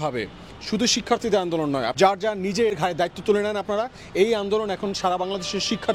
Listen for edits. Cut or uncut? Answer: cut